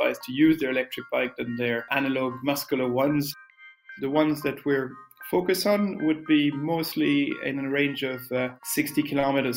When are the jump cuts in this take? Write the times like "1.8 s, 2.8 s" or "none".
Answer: 1.9 s, 3.7 s, 8.6 s